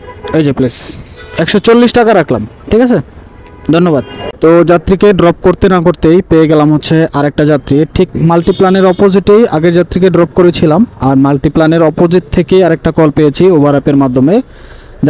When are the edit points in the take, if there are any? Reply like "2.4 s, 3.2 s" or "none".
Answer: none